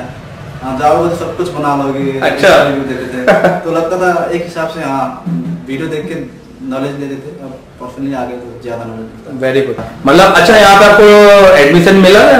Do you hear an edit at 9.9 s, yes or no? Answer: yes